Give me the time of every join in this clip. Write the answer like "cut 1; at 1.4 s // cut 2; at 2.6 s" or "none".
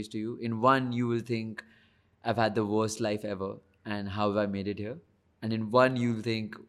none